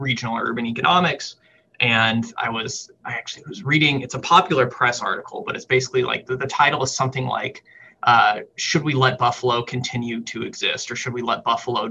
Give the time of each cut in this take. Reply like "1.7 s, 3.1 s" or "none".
5.6 s

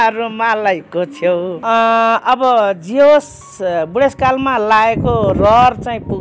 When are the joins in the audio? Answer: 1.5 s

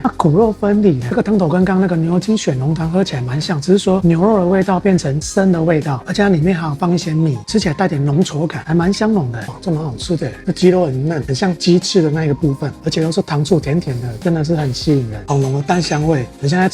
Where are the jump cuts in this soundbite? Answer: 1.0 s, 9.4 s, 15.2 s

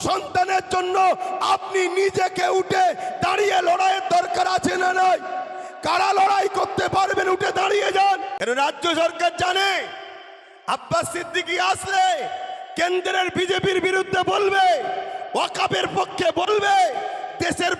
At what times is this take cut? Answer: 8.3 s

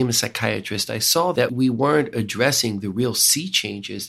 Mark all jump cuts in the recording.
1.4 s

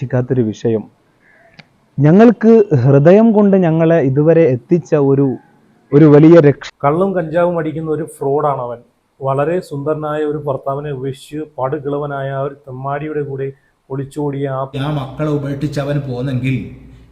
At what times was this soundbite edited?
6.6 s, 14.7 s

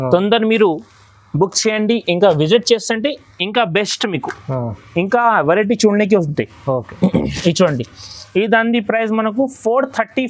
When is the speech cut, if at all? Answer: none

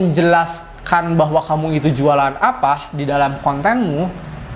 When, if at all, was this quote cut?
none

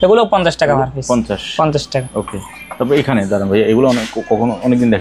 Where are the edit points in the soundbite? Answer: none

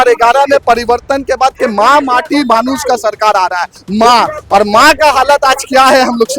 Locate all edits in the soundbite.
3.8 s

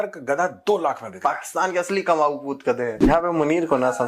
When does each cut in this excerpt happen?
3.0 s

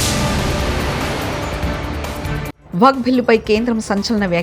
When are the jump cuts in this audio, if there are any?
2.2 s

